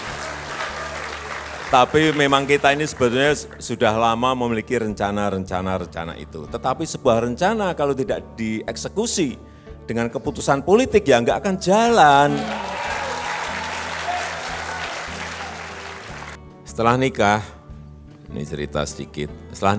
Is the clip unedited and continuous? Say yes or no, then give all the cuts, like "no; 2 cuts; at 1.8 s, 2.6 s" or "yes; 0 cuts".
no; 1 cut; at 16.4 s